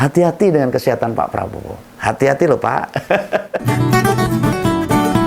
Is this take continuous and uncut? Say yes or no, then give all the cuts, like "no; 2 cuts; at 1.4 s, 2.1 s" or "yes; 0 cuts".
no; 1 cut; at 3.6 s